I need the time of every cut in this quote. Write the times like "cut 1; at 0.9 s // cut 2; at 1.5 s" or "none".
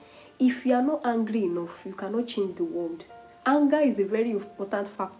none